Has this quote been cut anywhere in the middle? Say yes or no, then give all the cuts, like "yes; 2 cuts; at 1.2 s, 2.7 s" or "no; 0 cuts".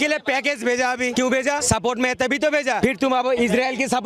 yes; 2 cuts; at 1.3 s, 3.2 s